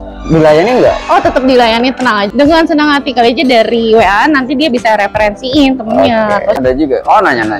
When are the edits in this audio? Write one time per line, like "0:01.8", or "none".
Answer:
0:02.5
0:06.6